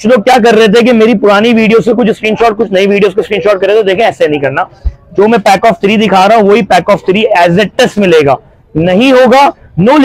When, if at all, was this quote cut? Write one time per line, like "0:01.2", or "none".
none